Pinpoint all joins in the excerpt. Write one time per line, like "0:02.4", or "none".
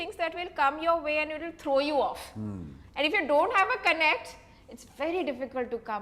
none